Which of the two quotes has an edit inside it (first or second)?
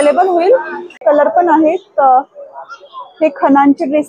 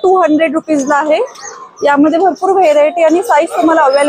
first